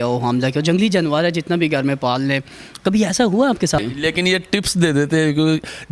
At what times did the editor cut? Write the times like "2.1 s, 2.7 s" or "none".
3.8 s

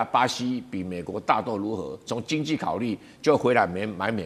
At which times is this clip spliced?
none

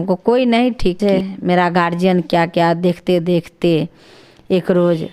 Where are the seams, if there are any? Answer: 1.0 s

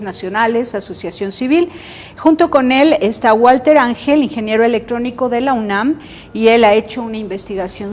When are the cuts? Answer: 1.5 s

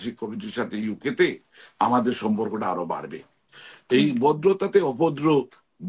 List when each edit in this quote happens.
3.3 s

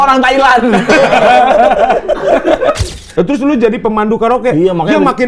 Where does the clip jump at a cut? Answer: 2.8 s

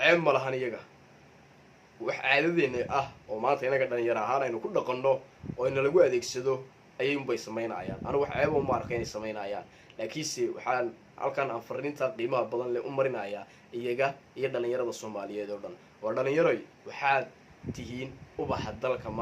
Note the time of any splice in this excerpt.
16.7 s

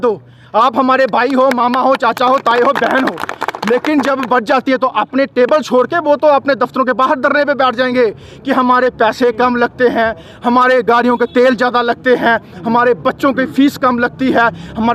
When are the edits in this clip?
none

